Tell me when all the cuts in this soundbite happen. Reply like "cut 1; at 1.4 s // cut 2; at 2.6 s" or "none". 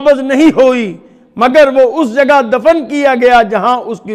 none